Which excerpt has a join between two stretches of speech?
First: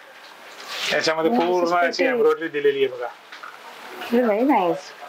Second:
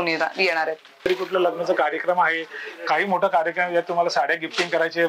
second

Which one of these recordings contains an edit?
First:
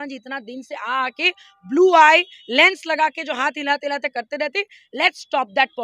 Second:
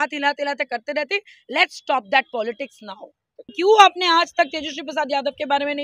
second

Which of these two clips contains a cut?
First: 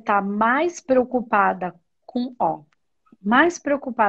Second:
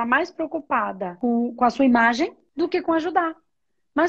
second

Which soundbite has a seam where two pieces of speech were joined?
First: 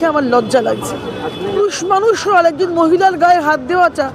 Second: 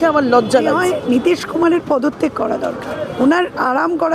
second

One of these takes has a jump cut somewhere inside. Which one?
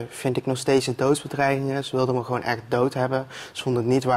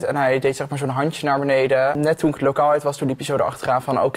second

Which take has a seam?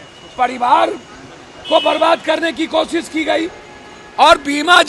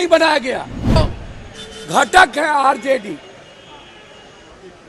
second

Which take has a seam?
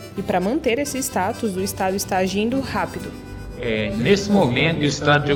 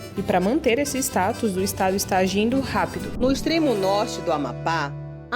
second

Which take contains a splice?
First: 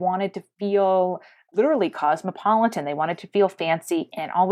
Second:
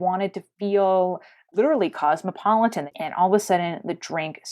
second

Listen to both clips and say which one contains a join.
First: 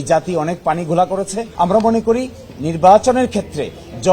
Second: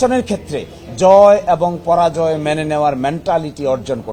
first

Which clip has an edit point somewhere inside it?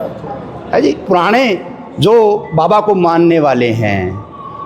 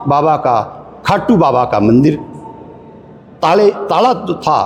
first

